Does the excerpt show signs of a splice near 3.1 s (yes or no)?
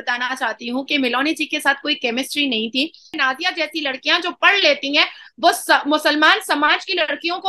yes